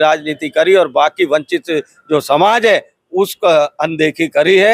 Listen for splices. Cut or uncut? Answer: uncut